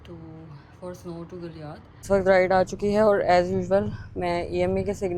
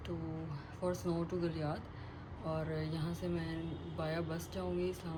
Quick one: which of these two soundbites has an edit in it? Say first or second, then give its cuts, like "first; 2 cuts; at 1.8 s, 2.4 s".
first; 1 cut; at 2.0 s